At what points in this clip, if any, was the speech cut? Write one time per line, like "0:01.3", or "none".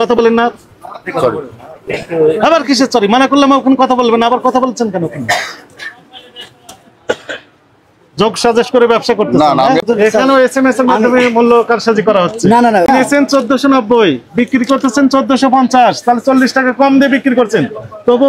0:09.8
0:12.9